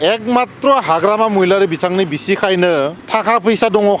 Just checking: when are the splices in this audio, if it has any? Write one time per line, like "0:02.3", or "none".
0:03.0